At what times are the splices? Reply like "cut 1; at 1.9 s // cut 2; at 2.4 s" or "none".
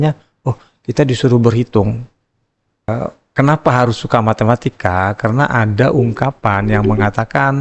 cut 1; at 2.9 s